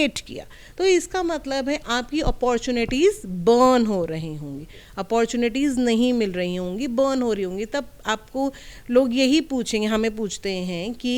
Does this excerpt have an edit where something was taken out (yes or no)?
no